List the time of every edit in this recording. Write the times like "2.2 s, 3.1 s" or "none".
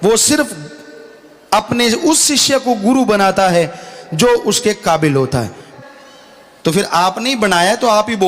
5.6 s

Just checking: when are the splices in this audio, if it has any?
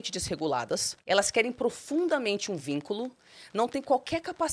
0.9 s

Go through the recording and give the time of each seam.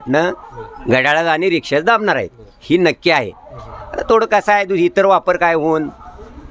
none

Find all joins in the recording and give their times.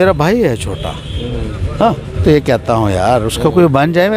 2.2 s

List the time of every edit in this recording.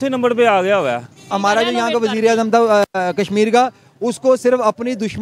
1.2 s

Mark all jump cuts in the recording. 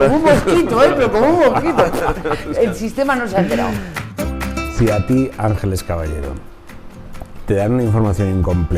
4.0 s

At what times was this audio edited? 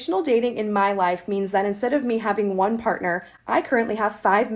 none

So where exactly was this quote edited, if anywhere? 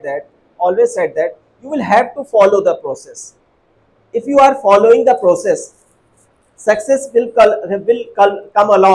none

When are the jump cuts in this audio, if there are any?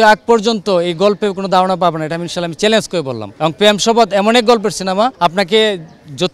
3.2 s, 5.1 s

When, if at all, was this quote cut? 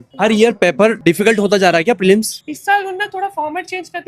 1.0 s, 2.4 s

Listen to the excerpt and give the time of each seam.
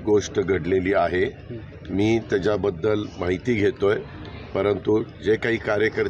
none

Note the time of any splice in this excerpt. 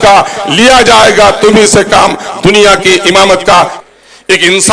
3.8 s

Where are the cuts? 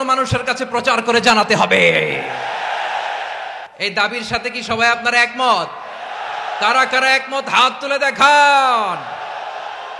3.7 s

